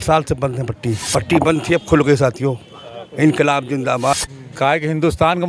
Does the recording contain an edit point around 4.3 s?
yes; 2 cuts; at 1.0 s, 4.3 s

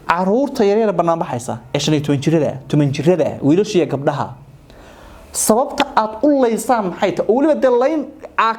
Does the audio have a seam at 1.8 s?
no; 0 cuts

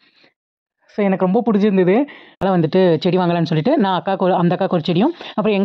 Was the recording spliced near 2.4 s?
yes; 1 cut; at 2.4 s

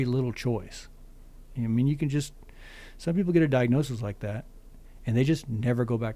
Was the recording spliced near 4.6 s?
no; 0 cuts

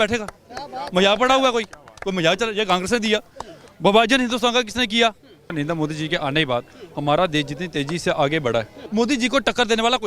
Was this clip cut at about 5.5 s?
yes; 2 cuts; at 5.5 s, 8.8 s

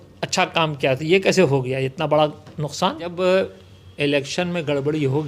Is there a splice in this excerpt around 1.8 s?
no; 1 cut; at 3.1 s

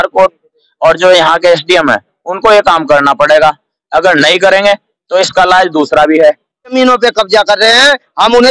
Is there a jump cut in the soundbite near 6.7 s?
yes; 1 cut; at 6.7 s

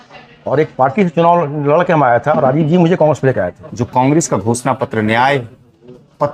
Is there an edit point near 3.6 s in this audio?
yes; 1 cut; at 3.6 s

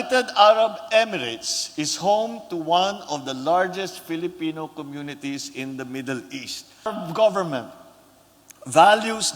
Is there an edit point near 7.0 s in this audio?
yes; 1 cut; at 7.0 s

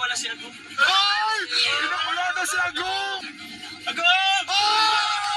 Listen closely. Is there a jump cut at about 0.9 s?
no; 1 cut; at 3.2 s

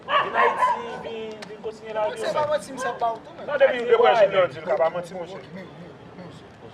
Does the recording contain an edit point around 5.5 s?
yes; 1 cut; at 5.5 s

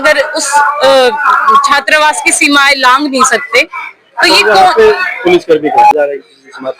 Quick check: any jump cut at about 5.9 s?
yes; 1 cut; at 5.9 s

